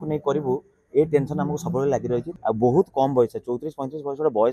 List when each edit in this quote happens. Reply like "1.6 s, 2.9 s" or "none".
2.3 s